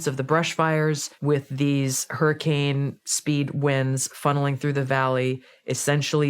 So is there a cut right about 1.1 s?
yes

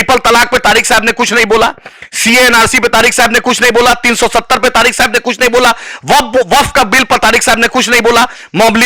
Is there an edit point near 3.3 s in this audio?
no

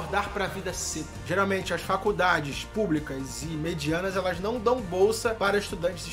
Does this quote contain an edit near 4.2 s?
no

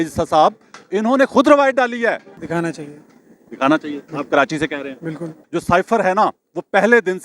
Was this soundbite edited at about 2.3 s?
yes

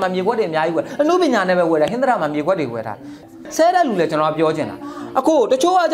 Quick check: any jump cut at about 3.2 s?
yes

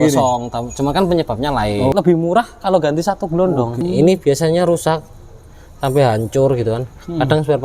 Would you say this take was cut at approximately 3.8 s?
yes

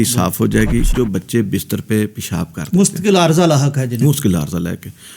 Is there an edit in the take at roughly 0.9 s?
yes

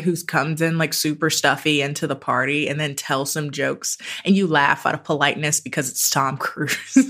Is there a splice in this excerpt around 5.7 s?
no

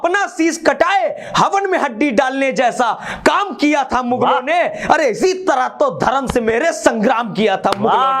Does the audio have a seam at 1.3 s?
no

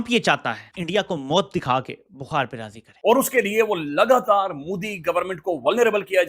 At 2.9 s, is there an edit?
yes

